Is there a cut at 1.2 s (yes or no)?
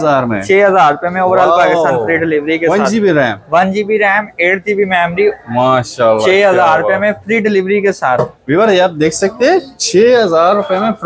no